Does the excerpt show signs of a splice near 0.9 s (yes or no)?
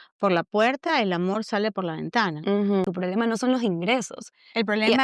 no